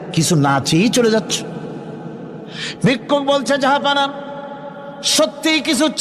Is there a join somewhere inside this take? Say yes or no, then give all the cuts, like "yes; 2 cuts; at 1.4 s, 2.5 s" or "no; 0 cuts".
no; 0 cuts